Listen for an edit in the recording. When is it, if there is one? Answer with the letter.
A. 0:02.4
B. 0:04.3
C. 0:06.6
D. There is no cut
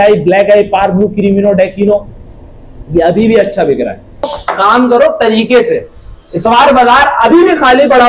B